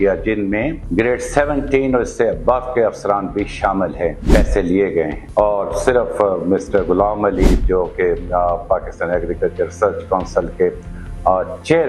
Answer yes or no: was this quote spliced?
yes